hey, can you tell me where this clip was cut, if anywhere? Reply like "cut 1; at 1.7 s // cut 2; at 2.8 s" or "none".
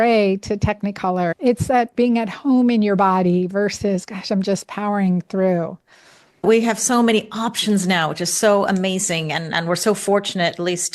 cut 1; at 1.3 s // cut 2; at 6.4 s

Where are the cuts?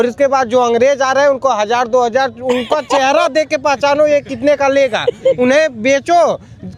none

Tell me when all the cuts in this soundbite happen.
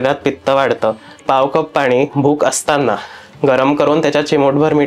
cut 1; at 1.2 s

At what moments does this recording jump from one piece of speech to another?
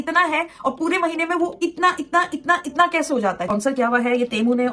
cut 1; at 3.4 s

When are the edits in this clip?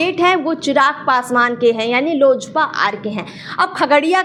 none

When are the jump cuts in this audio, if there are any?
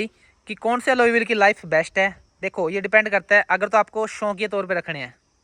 none

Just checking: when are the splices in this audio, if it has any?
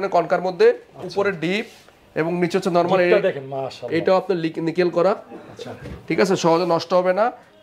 none

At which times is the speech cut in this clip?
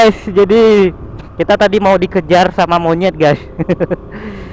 cut 1; at 1.1 s

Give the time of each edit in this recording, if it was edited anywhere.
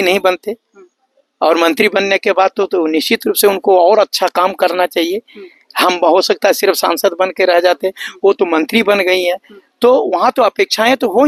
none

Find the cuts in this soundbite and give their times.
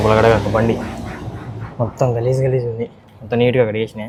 none

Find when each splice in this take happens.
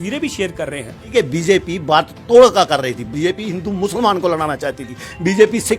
cut 1; at 1.1 s

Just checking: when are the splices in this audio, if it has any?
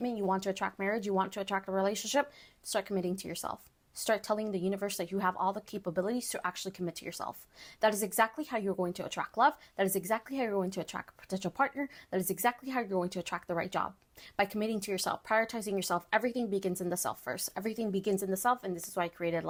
none

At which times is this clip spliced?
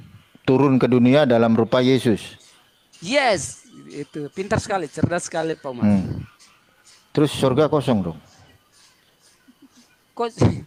none

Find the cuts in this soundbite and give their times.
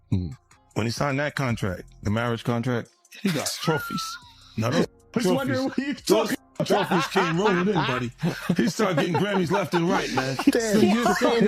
cut 1; at 10.5 s

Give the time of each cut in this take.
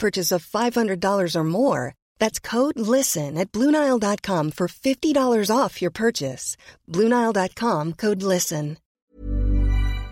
cut 1; at 9.0 s

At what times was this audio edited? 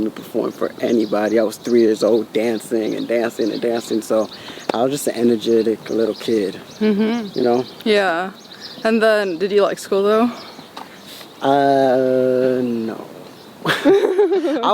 none

